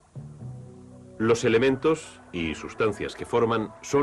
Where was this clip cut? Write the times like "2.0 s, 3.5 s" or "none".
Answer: 1.9 s